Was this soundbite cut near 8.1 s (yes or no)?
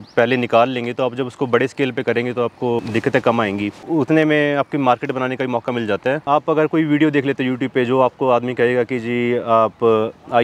no